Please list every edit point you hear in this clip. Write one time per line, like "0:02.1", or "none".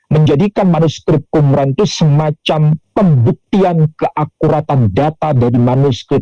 none